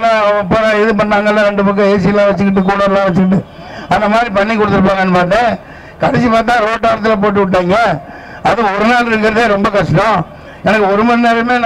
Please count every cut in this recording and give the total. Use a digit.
0